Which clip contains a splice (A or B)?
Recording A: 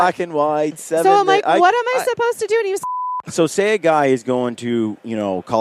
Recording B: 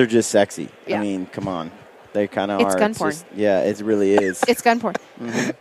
A